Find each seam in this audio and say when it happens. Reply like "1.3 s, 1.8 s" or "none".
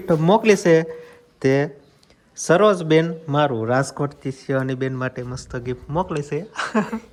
none